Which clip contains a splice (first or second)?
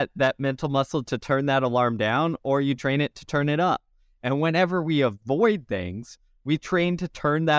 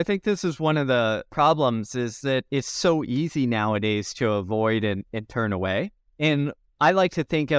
second